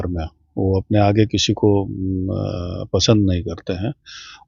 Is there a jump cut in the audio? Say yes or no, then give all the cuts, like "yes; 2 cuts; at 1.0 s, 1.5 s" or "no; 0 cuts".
no; 0 cuts